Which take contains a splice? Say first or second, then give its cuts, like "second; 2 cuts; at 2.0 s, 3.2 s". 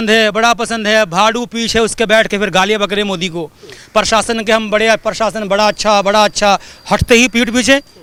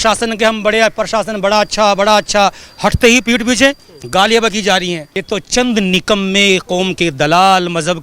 second; 1 cut; at 5.1 s